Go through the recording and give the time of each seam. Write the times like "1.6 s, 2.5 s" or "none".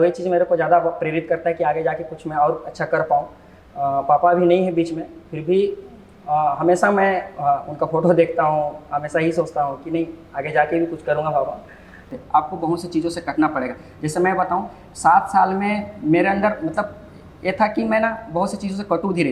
12.1 s